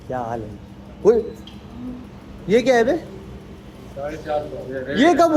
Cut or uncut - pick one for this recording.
uncut